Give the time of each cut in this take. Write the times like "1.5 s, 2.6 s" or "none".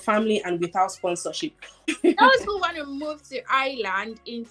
1.9 s

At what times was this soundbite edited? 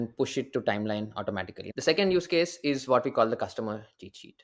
1.6 s

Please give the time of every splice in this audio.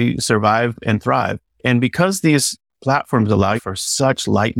1.6 s, 3.7 s

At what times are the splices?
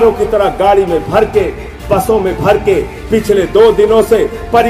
none

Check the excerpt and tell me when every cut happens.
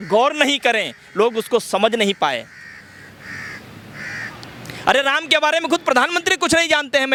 none

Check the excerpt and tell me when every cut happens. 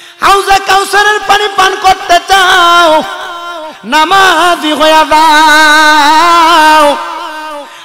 none

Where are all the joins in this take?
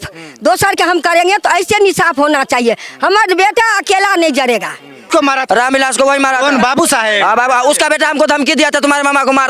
5.1 s

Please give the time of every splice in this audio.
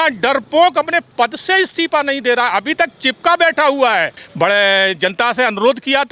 4.2 s

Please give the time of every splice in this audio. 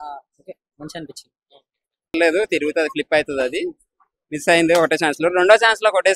2.1 s

